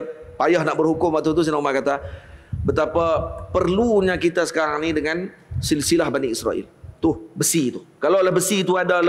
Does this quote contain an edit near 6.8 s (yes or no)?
no